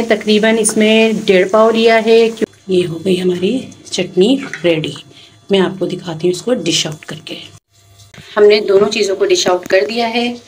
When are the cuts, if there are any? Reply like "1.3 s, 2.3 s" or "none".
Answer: 2.4 s, 8.1 s